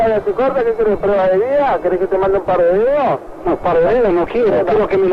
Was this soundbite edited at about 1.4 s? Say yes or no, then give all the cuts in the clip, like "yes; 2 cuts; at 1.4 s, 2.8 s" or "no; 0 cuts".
no; 0 cuts